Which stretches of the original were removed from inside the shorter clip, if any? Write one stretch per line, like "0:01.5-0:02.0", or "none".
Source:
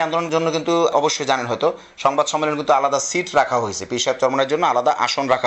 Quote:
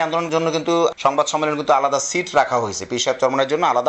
0:00.9-0:01.9